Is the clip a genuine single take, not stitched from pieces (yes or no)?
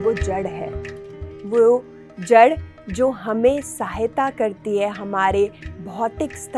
yes